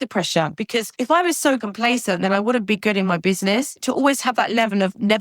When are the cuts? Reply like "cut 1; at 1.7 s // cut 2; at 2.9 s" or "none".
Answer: cut 1; at 0.7 s // cut 2; at 1.6 s // cut 3; at 3.8 s